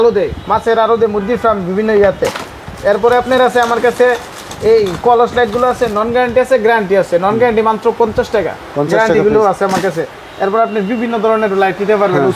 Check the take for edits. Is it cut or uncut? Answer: uncut